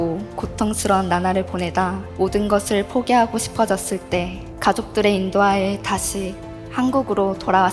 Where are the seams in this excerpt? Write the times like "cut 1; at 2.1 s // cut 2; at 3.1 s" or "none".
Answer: cut 1; at 2.0 s // cut 2; at 4.4 s